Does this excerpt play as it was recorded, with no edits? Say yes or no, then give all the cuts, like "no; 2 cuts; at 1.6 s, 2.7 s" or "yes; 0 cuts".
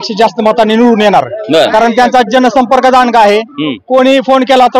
yes; 0 cuts